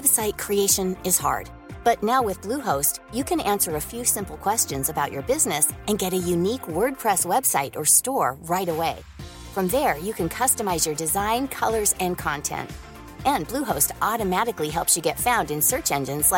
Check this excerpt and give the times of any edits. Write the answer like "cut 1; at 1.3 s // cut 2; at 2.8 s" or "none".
none